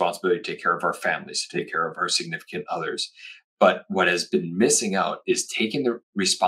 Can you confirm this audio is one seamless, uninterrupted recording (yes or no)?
no